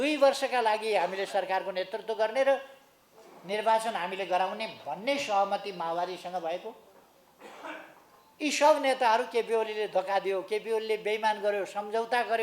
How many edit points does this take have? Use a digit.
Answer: 0